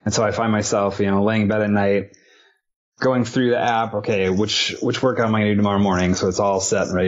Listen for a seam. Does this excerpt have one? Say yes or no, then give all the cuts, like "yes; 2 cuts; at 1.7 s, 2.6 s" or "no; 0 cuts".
no; 0 cuts